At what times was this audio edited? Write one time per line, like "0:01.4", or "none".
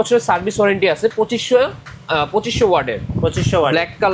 none